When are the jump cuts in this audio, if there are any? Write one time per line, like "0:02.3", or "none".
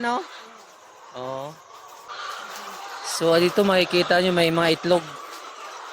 0:02.1